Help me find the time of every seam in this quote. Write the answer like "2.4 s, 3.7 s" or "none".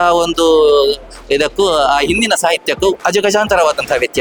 none